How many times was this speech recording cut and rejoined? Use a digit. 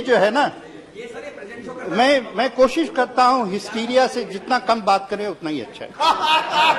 0